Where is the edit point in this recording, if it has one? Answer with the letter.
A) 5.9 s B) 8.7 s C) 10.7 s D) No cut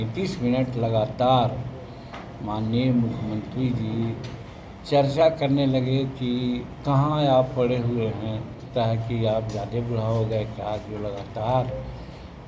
B